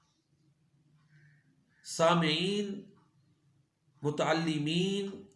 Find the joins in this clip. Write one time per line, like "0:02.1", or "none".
none